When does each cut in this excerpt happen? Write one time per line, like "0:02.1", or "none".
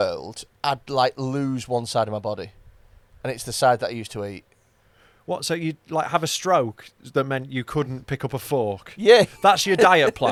none